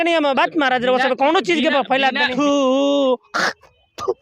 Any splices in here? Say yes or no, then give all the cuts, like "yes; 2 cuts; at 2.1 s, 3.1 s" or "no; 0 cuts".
yes; 1 cut; at 2.3 s